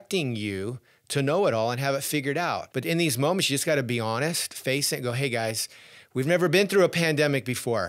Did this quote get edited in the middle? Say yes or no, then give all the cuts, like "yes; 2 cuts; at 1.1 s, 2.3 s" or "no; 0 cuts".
yes; 1 cut; at 2.7 s